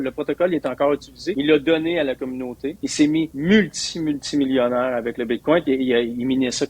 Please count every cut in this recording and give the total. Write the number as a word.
two